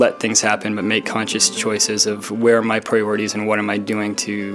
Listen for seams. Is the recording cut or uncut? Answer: uncut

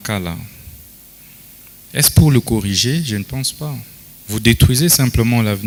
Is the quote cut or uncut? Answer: uncut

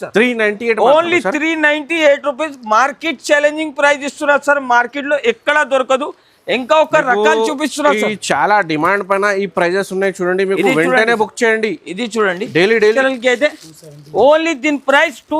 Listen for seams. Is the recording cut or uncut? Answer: cut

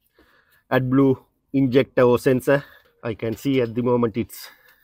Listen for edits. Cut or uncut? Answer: uncut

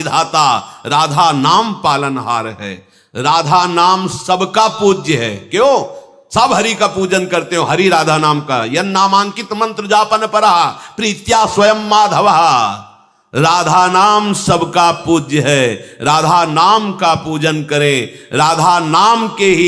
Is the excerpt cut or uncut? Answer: uncut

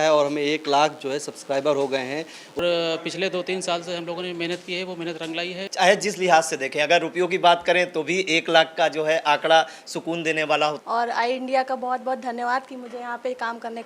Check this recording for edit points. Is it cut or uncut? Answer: cut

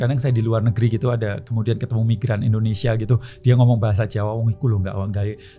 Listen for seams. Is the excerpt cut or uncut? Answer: uncut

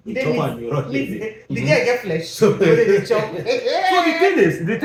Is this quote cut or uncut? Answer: uncut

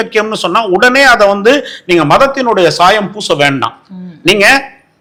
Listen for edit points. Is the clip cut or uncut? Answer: uncut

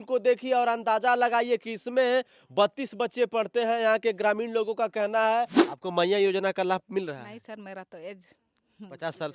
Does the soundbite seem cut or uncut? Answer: cut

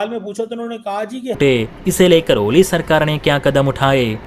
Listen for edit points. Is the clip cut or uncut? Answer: cut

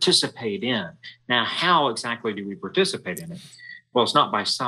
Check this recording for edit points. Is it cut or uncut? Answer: uncut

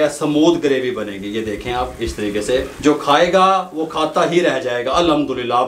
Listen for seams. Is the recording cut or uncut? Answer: cut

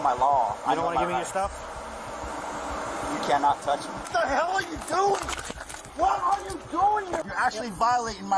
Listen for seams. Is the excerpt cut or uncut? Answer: cut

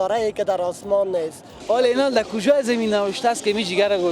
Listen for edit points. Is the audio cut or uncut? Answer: cut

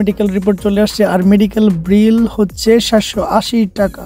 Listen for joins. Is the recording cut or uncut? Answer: uncut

